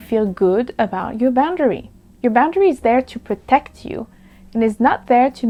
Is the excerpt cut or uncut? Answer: uncut